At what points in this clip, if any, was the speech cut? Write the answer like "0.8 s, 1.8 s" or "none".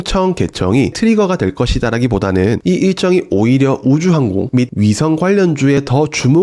0.9 s